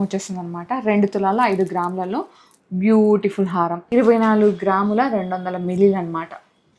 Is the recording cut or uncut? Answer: cut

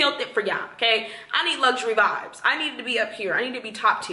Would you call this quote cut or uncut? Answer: uncut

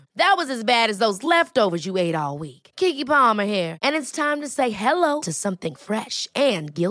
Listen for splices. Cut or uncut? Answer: uncut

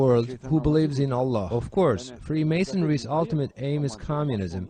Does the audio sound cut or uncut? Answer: cut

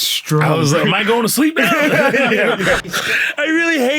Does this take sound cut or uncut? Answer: cut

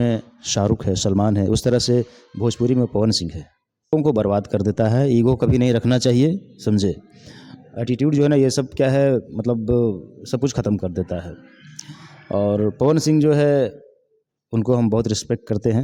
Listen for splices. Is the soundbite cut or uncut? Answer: cut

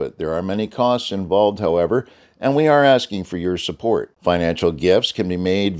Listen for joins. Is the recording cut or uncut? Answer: uncut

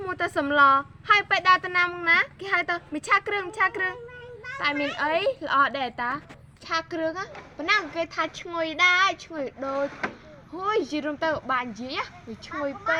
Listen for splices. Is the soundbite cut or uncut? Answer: uncut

